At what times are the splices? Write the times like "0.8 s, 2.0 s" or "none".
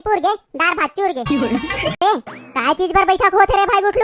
2.0 s